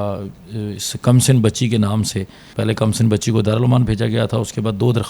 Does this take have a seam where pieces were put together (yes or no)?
yes